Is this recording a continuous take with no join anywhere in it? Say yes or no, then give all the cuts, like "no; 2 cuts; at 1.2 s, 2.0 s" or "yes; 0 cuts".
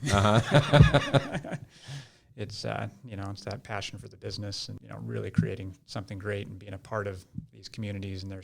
no; 1 cut; at 4.7 s